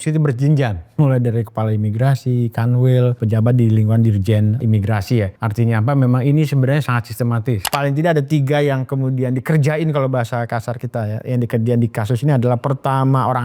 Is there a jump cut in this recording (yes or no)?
yes